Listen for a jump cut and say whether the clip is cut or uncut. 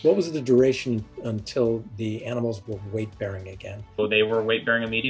cut